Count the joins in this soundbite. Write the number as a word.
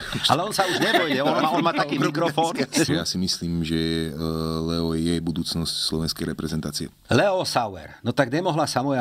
two